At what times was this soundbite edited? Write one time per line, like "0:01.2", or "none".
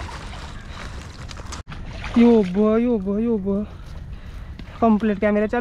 0:01.6